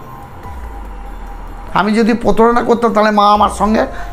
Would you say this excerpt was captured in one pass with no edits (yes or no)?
yes